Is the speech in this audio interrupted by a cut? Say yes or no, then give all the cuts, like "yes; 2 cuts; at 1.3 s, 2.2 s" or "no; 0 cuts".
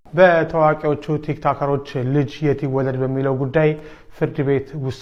no; 0 cuts